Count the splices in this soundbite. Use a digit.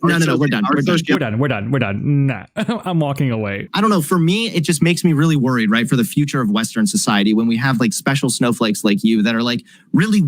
1